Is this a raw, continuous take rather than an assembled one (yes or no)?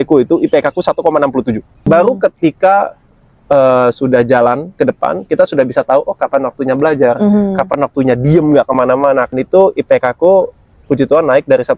no